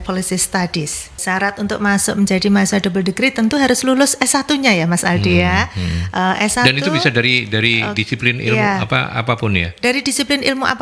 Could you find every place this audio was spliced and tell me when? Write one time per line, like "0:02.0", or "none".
0:01.2